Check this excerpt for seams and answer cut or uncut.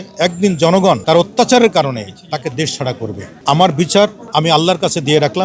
cut